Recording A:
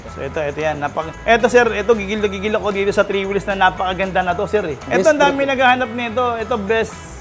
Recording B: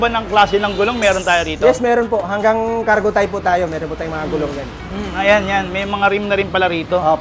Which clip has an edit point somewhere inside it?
A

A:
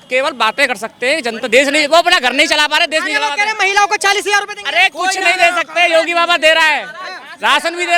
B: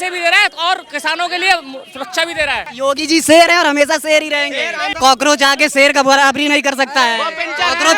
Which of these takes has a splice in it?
B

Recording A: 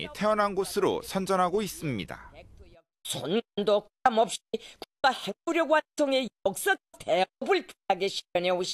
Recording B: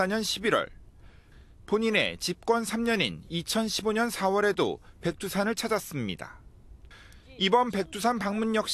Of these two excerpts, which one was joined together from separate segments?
A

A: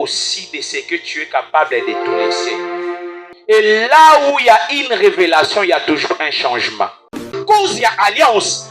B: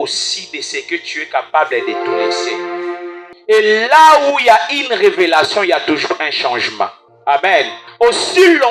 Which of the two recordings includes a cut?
A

